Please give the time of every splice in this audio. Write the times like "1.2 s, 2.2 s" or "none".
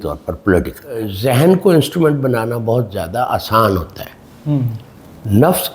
1.1 s